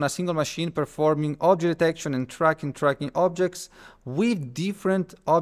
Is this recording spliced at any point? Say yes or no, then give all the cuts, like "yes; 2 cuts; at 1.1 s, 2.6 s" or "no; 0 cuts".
no; 0 cuts